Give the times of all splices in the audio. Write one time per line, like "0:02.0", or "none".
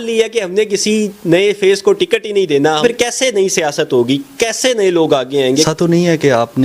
0:02.8
0:05.5

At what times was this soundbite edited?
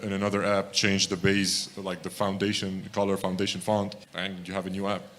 0:04.0

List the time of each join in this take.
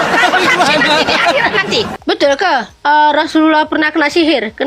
0:01.9

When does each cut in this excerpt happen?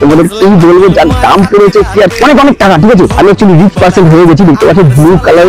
none

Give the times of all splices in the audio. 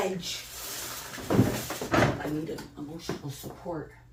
none

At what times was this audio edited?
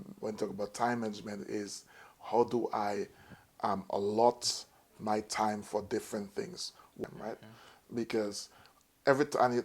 0:07.0

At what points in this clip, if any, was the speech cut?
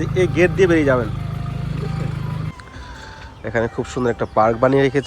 0:02.5

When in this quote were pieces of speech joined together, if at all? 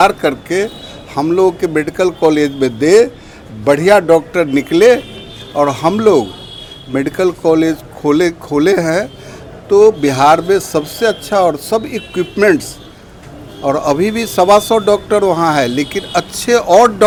none

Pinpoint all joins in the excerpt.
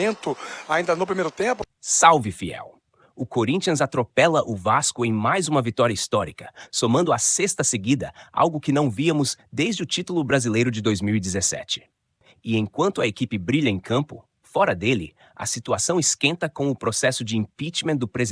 0:01.6

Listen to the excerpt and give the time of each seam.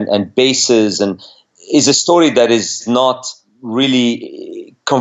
0:02.8

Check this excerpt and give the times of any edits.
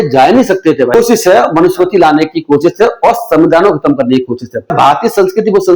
0:00.9
0:04.7

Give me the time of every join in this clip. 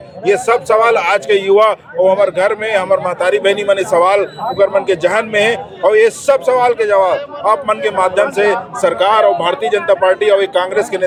none

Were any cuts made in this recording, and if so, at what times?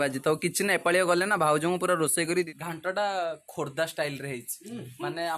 0:02.3

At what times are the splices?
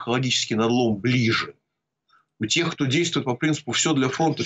none

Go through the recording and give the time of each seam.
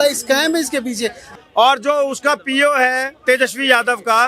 0:01.2

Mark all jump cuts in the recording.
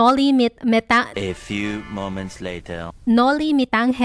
none

